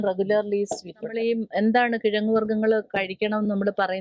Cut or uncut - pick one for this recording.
cut